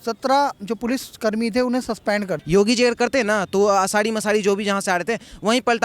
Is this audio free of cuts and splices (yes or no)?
no